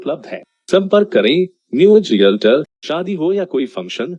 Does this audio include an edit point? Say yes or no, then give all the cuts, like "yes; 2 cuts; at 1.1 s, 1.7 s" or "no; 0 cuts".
yes; 1 cut; at 2.8 s